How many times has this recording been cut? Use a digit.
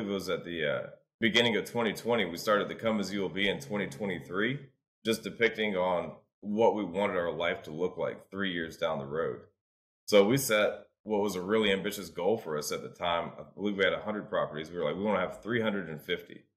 1